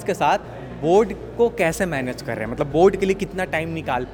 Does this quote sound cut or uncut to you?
uncut